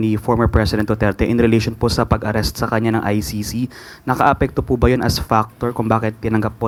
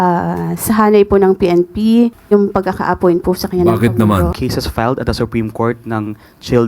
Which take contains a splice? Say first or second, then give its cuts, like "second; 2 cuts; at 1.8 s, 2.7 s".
second; 2 cuts; at 2.2 s, 4.4 s